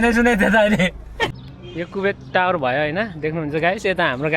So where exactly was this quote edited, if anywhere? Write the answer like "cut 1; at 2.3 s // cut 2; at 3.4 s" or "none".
cut 1; at 1.3 s